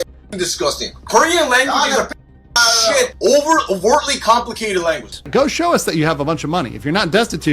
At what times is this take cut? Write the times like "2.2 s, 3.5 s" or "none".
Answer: 5.1 s